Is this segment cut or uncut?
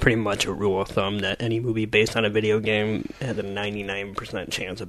uncut